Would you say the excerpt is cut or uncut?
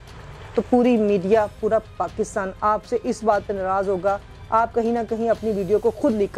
uncut